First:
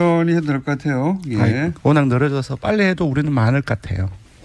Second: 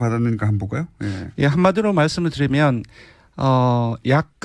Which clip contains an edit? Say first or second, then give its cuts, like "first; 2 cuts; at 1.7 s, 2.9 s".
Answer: second; 1 cut; at 1.5 s